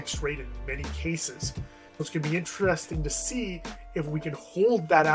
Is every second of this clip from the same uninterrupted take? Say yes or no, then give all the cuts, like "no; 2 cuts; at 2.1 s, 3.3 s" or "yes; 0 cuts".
no; 1 cut; at 1.8 s